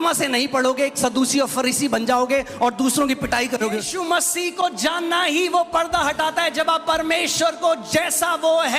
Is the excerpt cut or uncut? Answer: cut